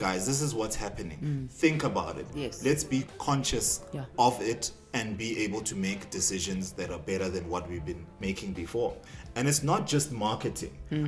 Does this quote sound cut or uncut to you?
cut